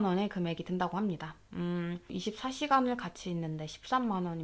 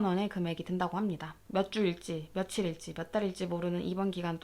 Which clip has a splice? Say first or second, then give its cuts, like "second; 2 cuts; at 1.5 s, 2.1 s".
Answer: second; 1 cut; at 1.3 s